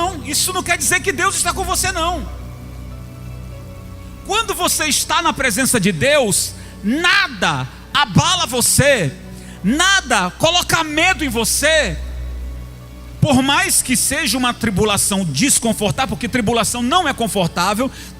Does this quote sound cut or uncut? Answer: uncut